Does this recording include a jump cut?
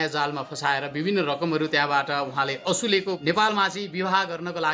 yes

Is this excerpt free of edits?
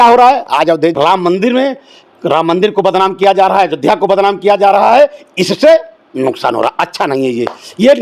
no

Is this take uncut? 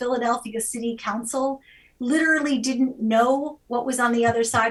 yes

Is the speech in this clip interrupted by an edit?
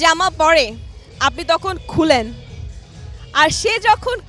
no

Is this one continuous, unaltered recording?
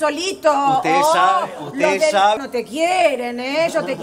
no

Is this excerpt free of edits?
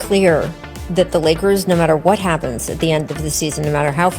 yes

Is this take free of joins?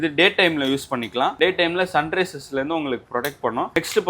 yes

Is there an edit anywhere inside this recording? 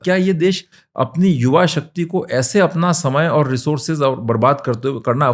no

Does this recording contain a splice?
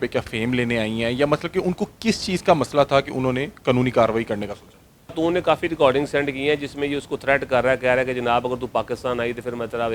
yes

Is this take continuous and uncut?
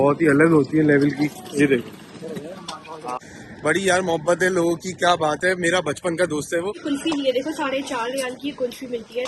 no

